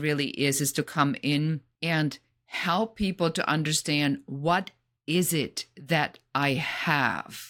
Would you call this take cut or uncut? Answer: cut